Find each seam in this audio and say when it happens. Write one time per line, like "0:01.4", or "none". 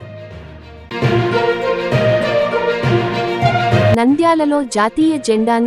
0:00.9
0:03.9